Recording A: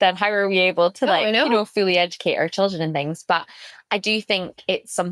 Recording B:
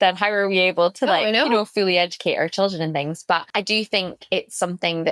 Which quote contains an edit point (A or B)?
B